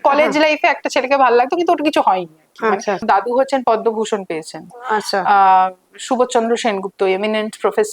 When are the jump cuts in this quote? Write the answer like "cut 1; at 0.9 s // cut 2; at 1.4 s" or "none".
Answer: cut 1; at 3.0 s